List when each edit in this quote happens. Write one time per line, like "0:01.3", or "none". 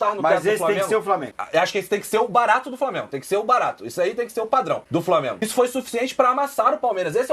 0:01.4
0:05.1

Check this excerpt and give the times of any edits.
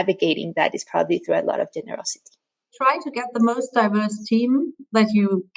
0:02.5

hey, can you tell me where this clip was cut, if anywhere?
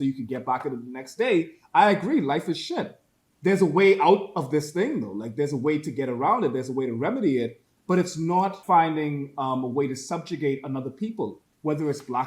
0:08.6

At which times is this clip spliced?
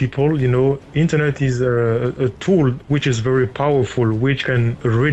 none

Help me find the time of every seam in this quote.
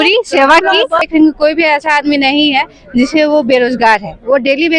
0:01.0

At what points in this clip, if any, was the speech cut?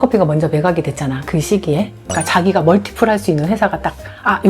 0:02.0

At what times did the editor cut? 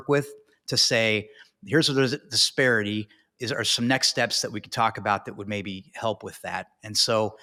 none

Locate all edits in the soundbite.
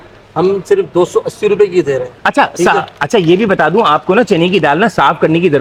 none

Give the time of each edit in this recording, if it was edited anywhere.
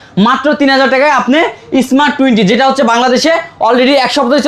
none

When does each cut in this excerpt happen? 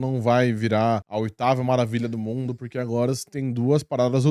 0:01.1

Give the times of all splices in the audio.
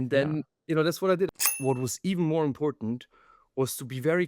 0:01.3

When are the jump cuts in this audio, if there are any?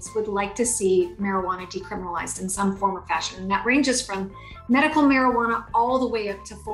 none

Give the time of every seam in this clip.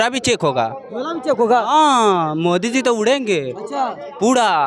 none

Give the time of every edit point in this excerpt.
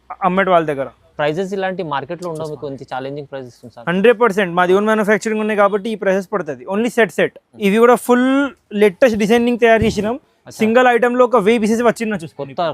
0:07.5

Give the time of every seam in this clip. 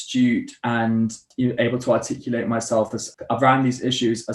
0:01.2
0:03.1

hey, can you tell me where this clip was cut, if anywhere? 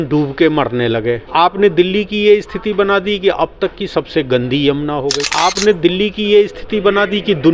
none

